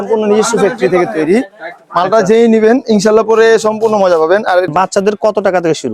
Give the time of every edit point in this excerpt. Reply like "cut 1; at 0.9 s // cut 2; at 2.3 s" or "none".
cut 1; at 4.7 s

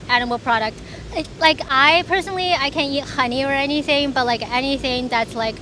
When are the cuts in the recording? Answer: none

